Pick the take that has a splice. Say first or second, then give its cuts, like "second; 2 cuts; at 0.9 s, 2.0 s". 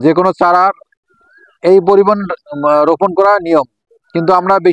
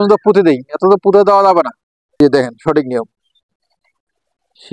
second; 1 cut; at 2.2 s